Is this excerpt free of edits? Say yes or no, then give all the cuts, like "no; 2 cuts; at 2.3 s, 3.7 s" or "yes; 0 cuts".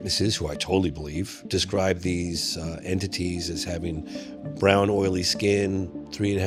yes; 0 cuts